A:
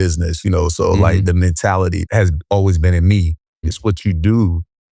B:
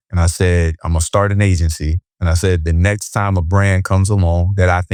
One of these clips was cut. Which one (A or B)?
A